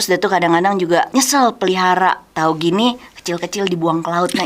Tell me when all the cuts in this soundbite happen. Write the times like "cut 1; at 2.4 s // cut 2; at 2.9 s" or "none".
cut 1; at 1.1 s // cut 2; at 2.3 s